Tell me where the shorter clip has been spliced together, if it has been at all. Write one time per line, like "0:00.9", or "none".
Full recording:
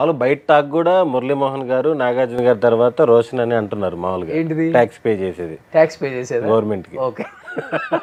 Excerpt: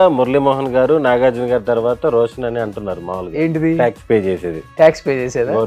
none